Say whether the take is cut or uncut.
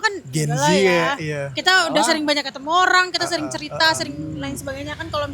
uncut